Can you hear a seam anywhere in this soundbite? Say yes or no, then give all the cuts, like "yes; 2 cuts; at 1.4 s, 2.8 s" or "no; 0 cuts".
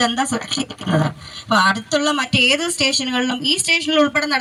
no; 0 cuts